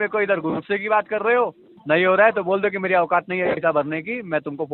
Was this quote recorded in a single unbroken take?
no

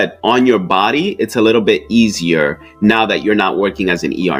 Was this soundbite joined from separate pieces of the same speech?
no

